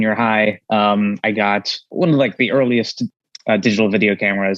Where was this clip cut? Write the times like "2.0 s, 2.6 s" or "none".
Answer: 1.9 s, 3.0 s